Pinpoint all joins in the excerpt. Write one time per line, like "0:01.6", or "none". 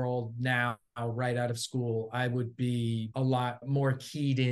0:03.3